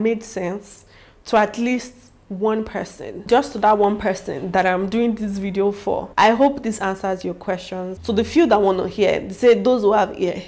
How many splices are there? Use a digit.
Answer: 2